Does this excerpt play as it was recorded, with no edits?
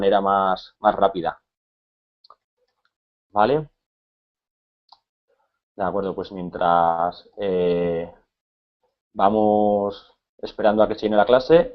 no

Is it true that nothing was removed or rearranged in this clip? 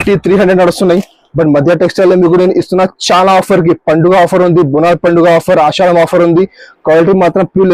yes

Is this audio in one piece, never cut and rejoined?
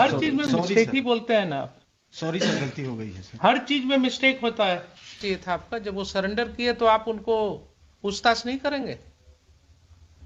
no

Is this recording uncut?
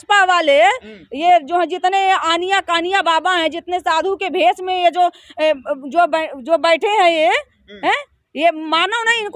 yes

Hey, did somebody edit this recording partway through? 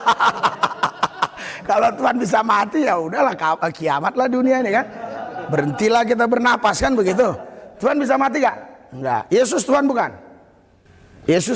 no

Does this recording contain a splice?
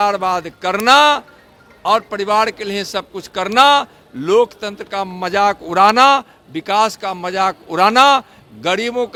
no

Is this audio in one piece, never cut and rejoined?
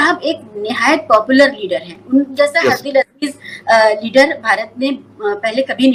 yes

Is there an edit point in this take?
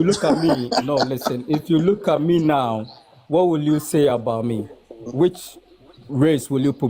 no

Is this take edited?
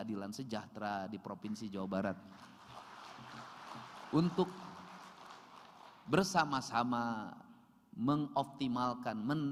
no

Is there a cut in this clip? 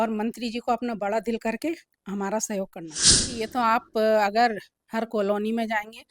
yes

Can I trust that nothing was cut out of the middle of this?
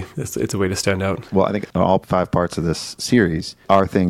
no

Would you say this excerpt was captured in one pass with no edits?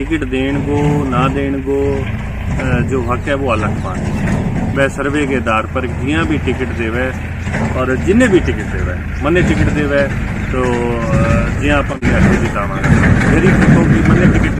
no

